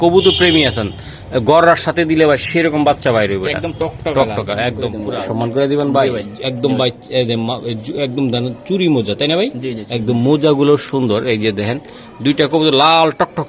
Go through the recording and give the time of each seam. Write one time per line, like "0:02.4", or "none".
0:04.9